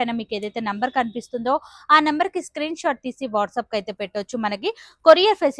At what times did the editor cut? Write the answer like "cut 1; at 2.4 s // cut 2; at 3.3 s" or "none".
none